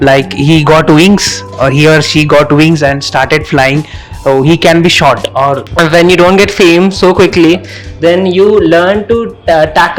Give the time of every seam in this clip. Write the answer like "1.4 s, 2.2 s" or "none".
5.7 s